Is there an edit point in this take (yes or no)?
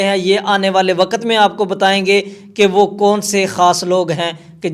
no